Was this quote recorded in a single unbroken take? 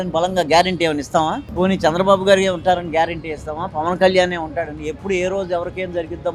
yes; 0 cuts

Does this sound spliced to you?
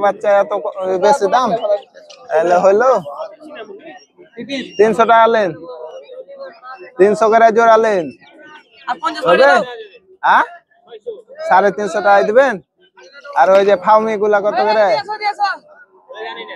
no; 0 cuts

